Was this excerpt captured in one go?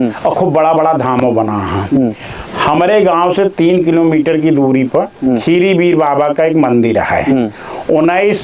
yes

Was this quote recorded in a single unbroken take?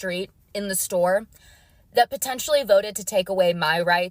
yes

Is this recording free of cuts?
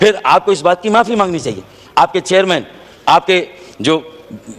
yes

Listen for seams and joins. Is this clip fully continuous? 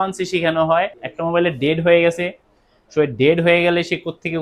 no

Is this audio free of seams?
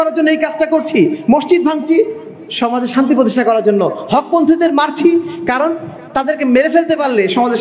yes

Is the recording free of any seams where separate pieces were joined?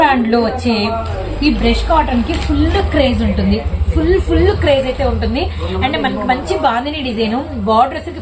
yes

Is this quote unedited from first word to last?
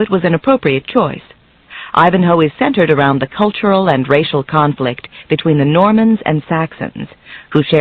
no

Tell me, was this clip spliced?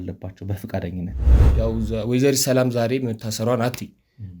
yes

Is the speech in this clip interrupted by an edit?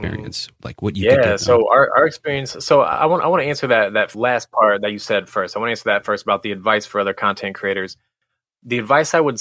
yes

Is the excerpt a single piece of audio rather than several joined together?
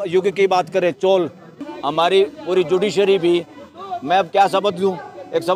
no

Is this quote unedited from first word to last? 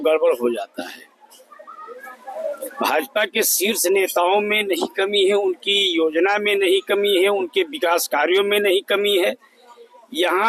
yes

